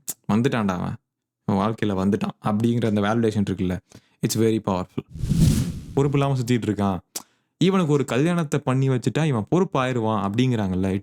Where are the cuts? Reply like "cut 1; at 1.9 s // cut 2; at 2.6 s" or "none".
cut 1; at 5.6 s